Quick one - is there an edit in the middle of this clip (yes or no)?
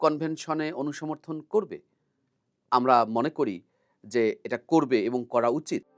no